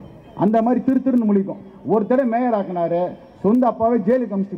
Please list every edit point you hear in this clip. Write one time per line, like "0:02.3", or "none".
none